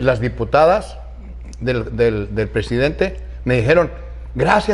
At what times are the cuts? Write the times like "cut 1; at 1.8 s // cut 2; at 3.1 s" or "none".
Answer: none